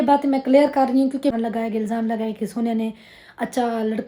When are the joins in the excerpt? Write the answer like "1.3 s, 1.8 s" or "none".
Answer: 1.3 s

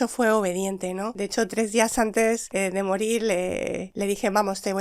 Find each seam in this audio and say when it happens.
1.1 s, 2.5 s, 3.9 s

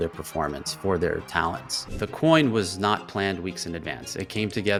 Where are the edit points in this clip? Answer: none

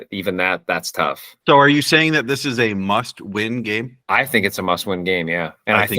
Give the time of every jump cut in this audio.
1.3 s

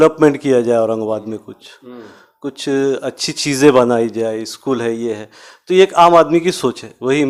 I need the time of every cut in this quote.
none

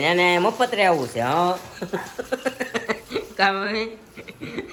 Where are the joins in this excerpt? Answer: none

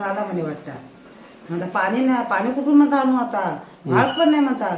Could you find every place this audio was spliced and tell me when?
none

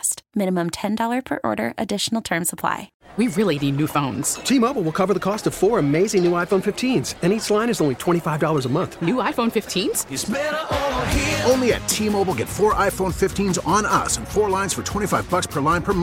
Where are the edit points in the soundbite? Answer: 3.0 s

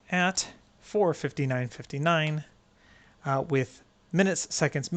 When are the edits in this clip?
none

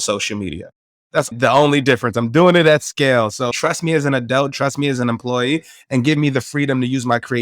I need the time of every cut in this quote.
1.3 s, 3.5 s

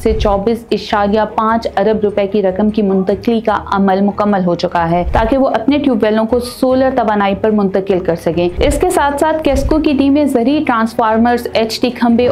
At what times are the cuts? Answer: none

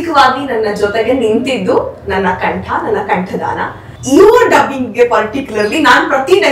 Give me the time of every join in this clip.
3.9 s

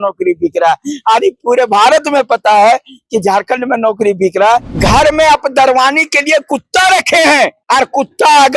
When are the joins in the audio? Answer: 4.7 s, 7.6 s

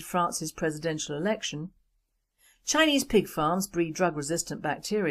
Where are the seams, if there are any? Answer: 3.9 s

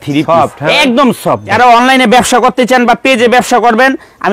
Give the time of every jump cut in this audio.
1.5 s

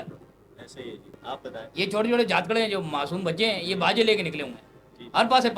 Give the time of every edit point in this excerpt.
1.2 s

